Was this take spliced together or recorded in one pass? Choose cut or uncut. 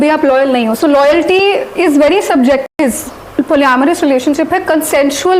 cut